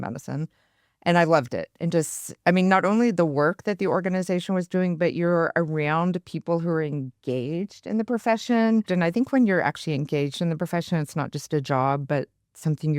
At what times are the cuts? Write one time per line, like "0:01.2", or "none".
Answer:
0:08.9